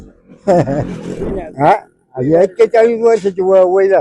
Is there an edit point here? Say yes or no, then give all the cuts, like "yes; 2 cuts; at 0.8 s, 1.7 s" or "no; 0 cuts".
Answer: yes; 1 cut; at 1.3 s